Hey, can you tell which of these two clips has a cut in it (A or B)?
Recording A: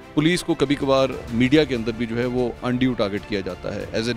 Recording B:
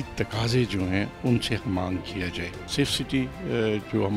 B